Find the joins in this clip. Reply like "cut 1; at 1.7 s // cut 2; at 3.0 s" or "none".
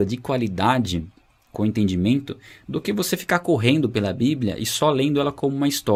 none